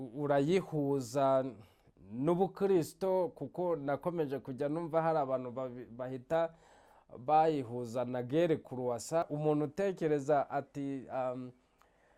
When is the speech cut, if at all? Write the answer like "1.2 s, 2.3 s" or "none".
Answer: 9.2 s